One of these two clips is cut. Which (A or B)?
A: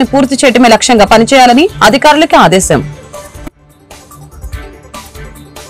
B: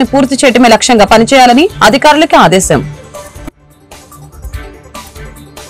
B